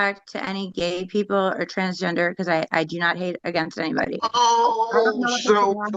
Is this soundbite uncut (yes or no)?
yes